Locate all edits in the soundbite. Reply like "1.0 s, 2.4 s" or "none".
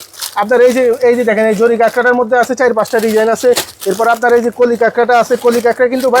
none